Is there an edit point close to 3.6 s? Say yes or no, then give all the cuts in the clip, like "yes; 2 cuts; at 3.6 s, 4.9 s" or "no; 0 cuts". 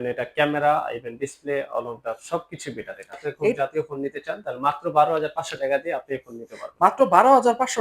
yes; 1 cut; at 3.6 s